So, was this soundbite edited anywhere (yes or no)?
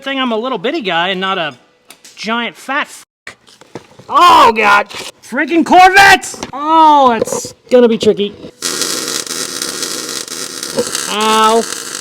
no